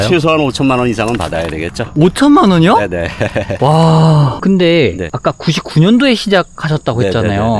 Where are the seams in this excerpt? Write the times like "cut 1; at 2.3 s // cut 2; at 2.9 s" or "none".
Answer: cut 1; at 4.4 s